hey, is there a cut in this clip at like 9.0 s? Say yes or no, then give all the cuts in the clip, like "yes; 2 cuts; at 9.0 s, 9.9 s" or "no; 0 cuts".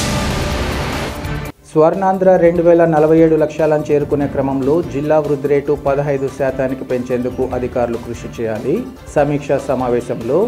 no; 1 cut; at 0.9 s